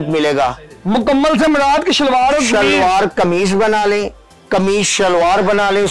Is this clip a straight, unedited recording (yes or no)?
yes